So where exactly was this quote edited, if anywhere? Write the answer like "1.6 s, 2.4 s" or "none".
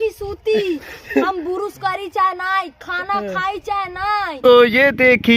4.4 s